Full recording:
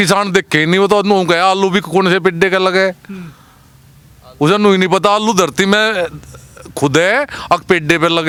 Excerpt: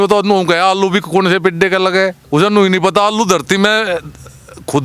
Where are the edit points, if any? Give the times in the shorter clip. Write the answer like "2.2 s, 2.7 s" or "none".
2.2 s